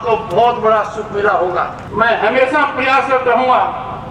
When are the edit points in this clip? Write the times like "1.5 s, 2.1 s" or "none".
1.8 s